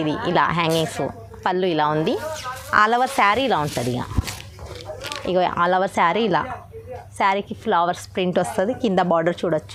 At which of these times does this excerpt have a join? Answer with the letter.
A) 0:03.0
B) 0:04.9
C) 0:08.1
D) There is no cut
D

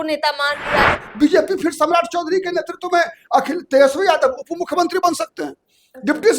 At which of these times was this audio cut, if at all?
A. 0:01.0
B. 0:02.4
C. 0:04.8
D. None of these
A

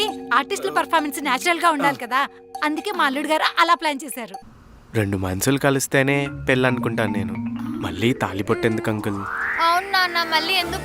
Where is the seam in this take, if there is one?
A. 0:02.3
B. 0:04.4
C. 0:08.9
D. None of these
B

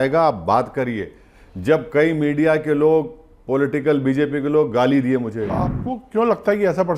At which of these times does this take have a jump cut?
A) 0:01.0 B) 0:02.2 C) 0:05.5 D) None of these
C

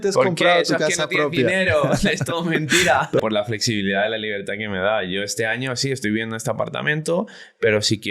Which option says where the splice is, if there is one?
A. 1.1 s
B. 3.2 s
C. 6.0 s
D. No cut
B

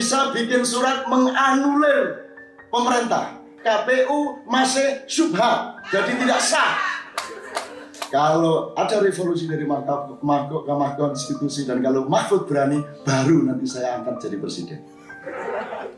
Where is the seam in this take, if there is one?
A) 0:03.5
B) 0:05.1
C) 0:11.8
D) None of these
A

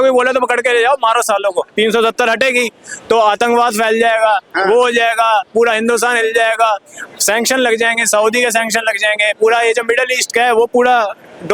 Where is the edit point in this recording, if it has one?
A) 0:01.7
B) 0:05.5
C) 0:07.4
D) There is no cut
A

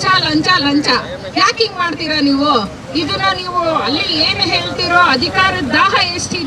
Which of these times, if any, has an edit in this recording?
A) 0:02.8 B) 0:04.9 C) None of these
C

